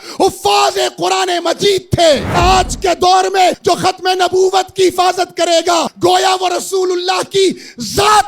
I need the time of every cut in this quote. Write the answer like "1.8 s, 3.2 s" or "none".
2.4 s, 3.6 s, 5.9 s